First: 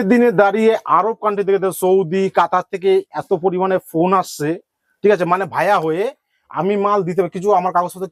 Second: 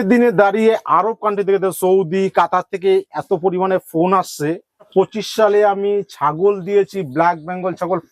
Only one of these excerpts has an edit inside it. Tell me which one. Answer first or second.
second